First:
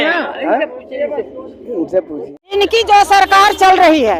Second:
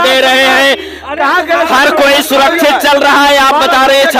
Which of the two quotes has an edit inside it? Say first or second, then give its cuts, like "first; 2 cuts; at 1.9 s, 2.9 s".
first; 1 cut; at 2.5 s